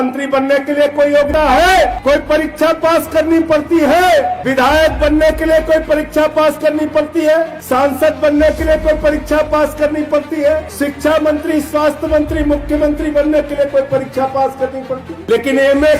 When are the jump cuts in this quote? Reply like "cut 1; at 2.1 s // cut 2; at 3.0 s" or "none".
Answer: cut 1; at 1.3 s // cut 2; at 2.0 s // cut 3; at 4.4 s // cut 4; at 7.6 s // cut 5; at 10.7 s // cut 6; at 15.1 s

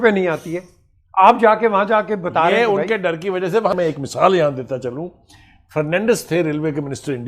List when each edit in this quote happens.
cut 1; at 3.7 s

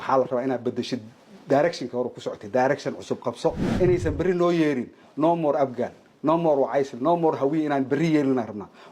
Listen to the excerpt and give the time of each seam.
cut 1; at 3.6 s

